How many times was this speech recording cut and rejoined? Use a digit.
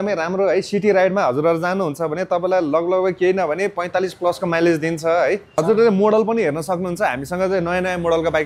1